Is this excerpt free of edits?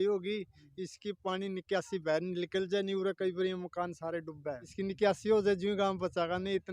no; 1 cut; at 4.7 s

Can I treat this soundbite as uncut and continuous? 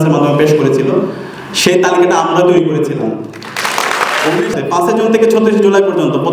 no; 1 cut; at 4.5 s

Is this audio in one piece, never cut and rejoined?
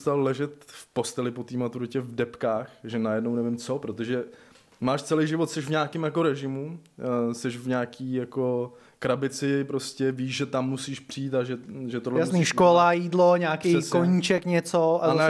yes; 0 cuts

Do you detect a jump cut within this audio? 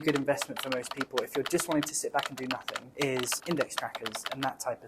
yes; 1 cut; at 2.8 s

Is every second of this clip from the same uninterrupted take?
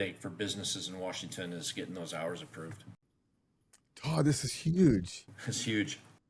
yes; 0 cuts

